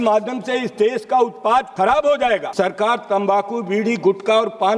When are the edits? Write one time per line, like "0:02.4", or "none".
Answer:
0:01.7
0:02.5